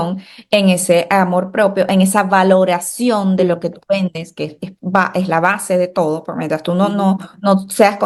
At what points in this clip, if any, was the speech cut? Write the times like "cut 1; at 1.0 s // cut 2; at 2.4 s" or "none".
none